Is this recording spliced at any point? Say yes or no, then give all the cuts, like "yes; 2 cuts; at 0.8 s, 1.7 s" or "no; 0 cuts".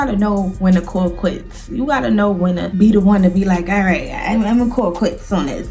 no; 0 cuts